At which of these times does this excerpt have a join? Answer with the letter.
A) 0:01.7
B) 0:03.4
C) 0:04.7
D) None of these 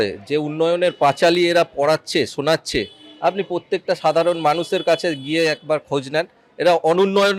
D